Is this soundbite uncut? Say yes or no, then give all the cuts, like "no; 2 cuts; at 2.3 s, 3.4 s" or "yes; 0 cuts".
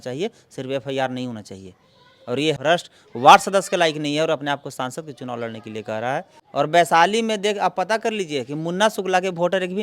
no; 1 cut; at 6.4 s